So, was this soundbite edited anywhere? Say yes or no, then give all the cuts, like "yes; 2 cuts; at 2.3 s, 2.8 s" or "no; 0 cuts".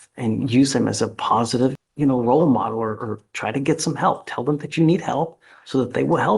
yes; 1 cut; at 1.9 s